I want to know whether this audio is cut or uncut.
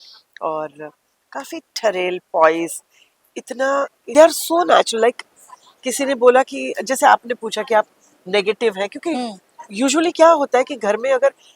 cut